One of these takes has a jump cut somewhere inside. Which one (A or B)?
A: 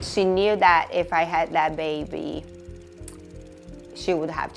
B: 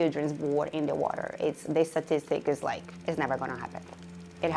B